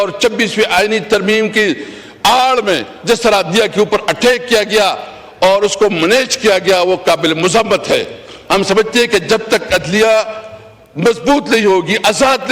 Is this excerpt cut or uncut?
uncut